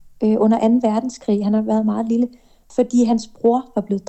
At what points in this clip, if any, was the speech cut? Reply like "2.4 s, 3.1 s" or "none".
2.6 s